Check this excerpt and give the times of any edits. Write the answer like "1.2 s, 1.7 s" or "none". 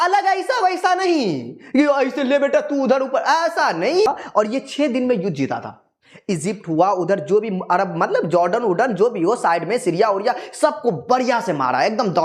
4.1 s